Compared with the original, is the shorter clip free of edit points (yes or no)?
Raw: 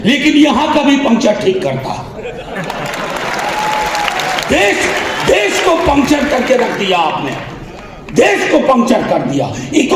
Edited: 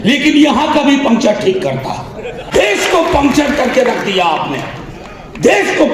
no